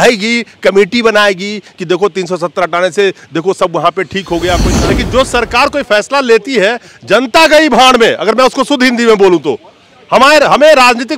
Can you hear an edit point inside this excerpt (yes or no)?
yes